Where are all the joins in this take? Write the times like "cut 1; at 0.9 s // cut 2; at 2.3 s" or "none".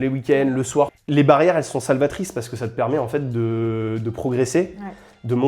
cut 1; at 1.0 s